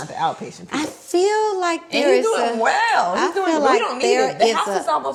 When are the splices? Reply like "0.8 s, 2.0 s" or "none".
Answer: none